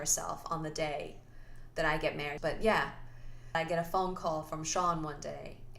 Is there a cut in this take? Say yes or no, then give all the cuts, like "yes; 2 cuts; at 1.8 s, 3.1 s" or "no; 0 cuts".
yes; 2 cuts; at 2.4 s, 3.6 s